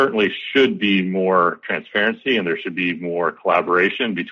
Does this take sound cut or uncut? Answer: uncut